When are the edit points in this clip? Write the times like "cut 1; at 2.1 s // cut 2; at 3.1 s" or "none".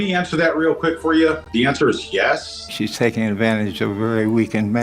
cut 1; at 1.4 s // cut 2; at 2.8 s